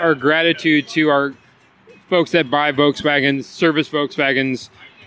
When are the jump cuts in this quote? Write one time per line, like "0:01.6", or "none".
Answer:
none